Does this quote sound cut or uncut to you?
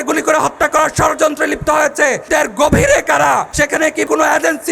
cut